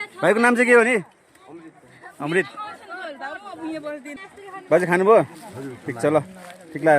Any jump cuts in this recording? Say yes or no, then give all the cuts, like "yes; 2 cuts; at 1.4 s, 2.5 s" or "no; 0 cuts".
yes; 1 cut; at 4.2 s